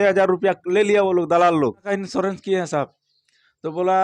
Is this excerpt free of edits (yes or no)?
no